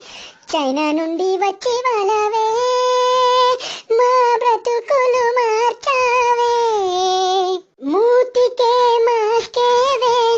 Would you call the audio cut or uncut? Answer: cut